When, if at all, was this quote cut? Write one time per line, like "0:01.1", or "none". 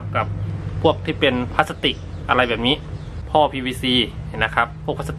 0:03.2